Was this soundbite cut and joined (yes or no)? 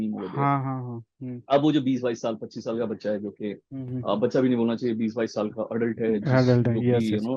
no